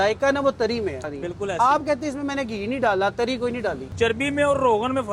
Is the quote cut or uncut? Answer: cut